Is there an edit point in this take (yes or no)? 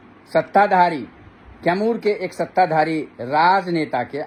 no